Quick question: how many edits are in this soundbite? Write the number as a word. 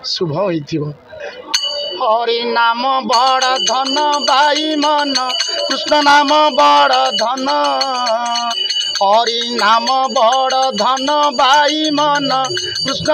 one